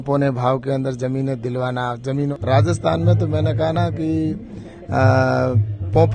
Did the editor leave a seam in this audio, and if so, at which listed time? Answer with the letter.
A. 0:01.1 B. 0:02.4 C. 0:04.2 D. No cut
B